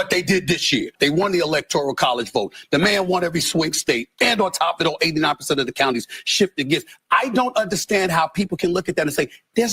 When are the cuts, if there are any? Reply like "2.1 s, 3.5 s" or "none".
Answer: 0.9 s